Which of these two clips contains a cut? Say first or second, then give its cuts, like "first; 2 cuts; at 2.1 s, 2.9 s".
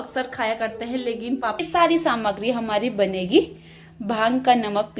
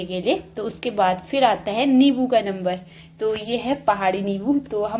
first; 1 cut; at 1.6 s